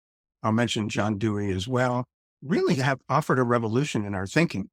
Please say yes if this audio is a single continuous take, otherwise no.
yes